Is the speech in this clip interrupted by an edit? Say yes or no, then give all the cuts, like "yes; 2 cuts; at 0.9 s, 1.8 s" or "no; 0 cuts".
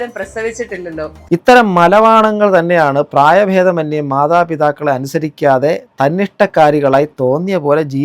yes; 1 cut; at 1.2 s